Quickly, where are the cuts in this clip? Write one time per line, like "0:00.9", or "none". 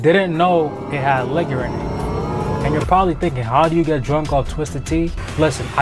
none